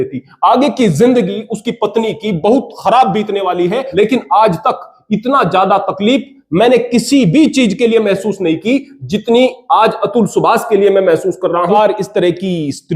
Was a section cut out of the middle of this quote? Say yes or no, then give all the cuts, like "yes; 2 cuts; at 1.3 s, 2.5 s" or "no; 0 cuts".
yes; 2 cuts; at 3.9 s, 11.7 s